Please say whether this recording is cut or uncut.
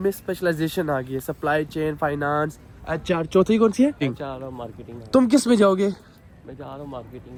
uncut